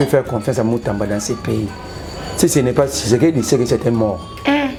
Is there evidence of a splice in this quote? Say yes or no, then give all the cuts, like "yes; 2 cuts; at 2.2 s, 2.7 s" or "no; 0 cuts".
no; 0 cuts